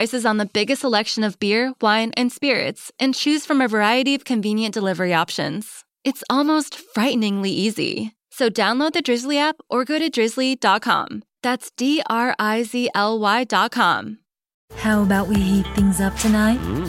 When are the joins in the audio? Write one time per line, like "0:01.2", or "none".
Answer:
0:14.5